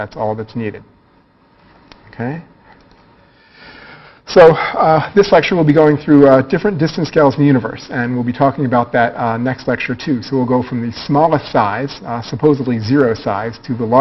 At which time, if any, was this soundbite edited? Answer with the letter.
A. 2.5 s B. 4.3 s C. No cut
C